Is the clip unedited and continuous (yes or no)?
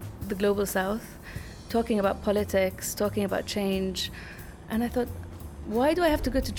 yes